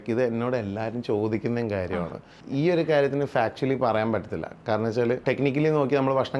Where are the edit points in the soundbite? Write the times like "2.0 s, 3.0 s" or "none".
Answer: 2.4 s, 5.2 s